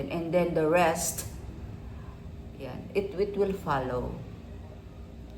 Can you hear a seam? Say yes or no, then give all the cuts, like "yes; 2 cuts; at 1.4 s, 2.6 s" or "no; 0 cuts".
no; 0 cuts